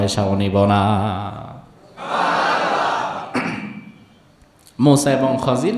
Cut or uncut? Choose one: cut